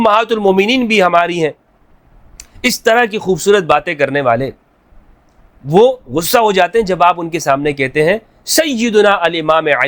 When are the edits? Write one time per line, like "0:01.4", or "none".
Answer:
none